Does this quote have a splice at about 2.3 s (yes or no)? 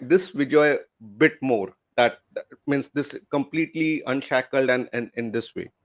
no